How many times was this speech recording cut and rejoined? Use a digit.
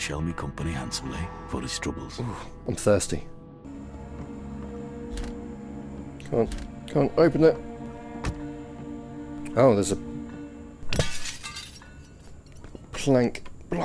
1